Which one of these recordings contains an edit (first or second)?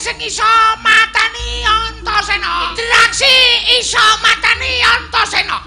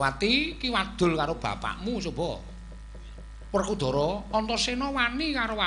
first